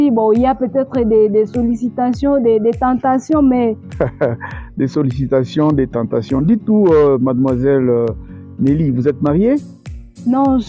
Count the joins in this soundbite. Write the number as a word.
one